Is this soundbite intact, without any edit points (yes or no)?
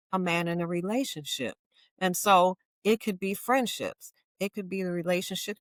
yes